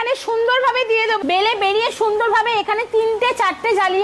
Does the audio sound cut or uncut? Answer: cut